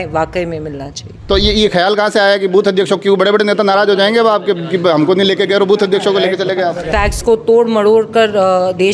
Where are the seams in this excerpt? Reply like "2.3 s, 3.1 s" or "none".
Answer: 1.1 s, 6.8 s